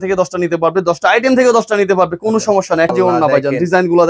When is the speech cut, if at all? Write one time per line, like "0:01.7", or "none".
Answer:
0:02.9